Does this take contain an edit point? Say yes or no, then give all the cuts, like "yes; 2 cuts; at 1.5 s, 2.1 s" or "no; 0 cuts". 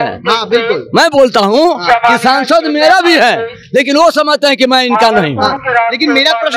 no; 0 cuts